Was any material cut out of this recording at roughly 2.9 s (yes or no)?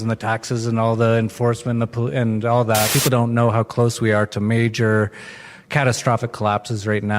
yes